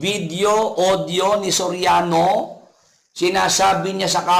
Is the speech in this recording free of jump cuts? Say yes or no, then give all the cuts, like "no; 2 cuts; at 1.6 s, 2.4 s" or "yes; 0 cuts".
yes; 0 cuts